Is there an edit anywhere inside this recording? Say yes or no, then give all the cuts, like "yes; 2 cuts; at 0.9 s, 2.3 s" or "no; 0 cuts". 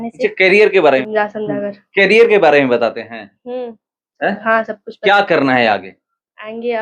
yes; 1 cut; at 1.0 s